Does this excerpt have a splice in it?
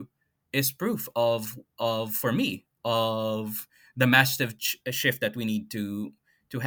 no; 0 cuts

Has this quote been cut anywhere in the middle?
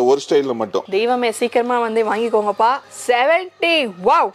yes; 1 cut; at 2.9 s

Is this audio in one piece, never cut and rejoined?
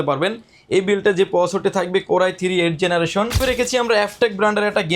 no; 1 cut; at 3.4 s

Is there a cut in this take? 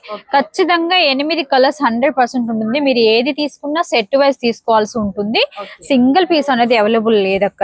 no; 0 cuts

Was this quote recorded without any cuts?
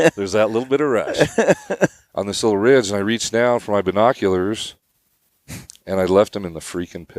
no; 1 cut; at 2.1 s

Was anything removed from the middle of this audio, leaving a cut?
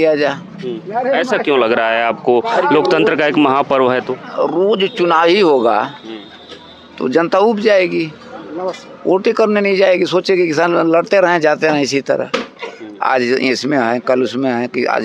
no; 0 cuts

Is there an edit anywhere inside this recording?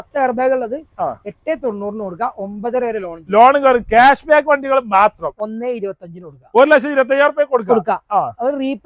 yes; 1 cut; at 5.3 s

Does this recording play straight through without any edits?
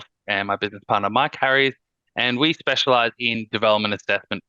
yes; 0 cuts

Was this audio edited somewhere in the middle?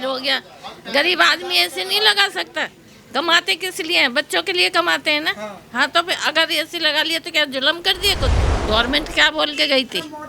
yes; 1 cut; at 8.5 s

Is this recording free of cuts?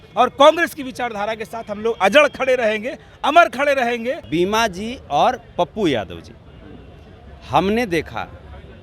no; 1 cut; at 4.2 s

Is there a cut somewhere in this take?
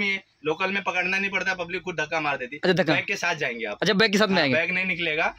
no; 0 cuts

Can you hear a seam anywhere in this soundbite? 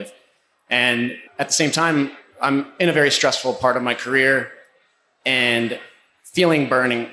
yes; 1 cut; at 1.2 s

